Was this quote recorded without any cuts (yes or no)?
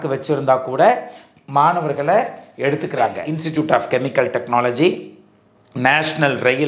no